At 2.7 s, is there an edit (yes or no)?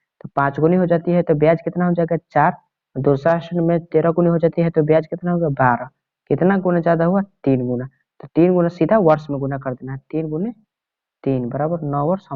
no